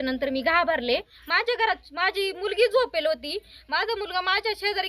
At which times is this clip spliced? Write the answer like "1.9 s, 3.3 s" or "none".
1.2 s